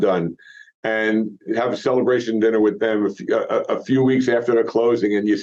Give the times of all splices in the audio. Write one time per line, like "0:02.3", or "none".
none